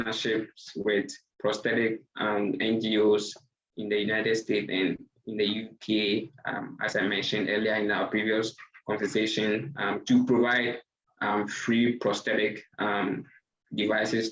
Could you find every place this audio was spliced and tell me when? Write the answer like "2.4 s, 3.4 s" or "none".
none